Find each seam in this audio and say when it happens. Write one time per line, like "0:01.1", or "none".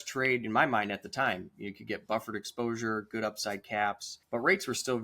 0:04.1